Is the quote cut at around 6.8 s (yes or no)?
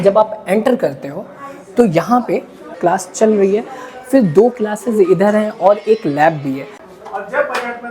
yes